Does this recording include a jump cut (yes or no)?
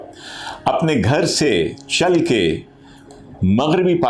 no